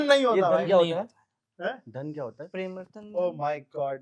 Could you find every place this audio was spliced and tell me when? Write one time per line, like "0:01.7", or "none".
none